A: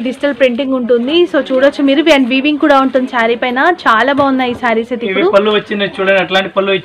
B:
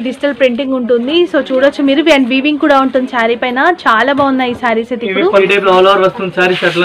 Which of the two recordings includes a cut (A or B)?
B